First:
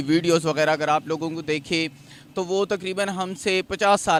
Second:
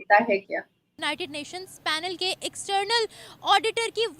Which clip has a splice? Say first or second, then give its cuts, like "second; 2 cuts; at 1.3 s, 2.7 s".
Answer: second; 1 cut; at 1.1 s